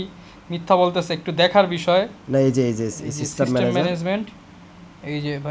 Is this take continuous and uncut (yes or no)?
yes